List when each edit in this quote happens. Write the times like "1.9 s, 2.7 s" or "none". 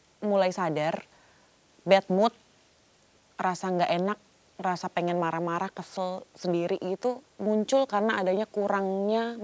none

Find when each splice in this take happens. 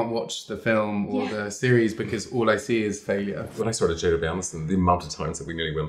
3.5 s

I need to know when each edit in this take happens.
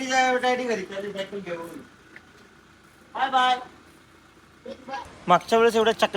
5.1 s

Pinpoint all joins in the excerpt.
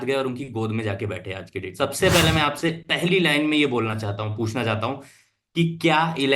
1.6 s

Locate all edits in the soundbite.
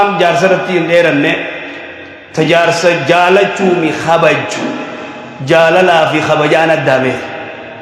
none

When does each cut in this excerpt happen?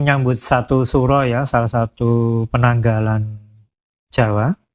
none

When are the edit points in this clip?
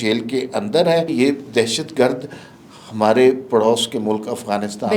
1.1 s

